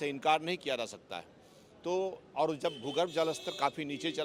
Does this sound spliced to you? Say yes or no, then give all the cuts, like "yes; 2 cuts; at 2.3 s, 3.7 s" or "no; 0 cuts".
no; 0 cuts